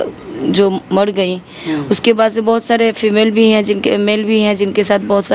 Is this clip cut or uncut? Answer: uncut